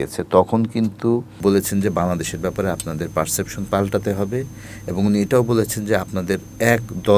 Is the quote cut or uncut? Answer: cut